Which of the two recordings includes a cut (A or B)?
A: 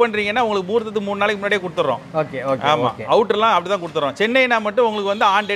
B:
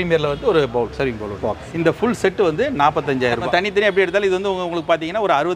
B